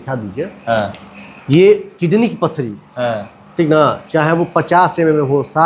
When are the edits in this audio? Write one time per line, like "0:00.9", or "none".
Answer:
none